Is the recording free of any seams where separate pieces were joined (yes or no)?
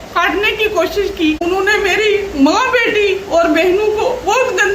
no